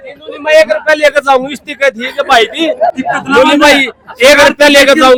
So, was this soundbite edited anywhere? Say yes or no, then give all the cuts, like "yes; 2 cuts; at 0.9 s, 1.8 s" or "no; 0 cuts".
no; 0 cuts